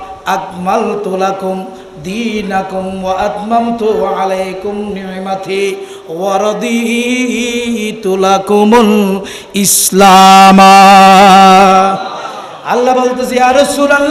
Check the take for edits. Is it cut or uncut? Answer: uncut